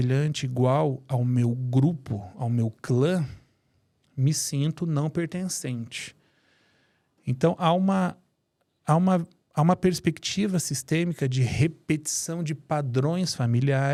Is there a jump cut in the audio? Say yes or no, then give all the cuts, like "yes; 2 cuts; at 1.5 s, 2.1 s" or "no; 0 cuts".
no; 0 cuts